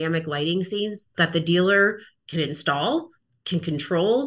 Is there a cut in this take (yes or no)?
no